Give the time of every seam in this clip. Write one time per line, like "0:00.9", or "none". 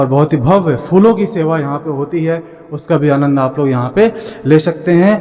none